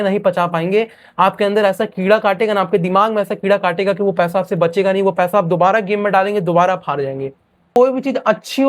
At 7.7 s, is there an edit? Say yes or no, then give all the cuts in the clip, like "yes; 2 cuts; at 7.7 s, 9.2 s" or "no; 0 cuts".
yes; 1 cut; at 7.7 s